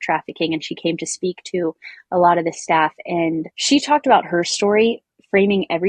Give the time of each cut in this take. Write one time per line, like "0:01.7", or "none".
0:03.6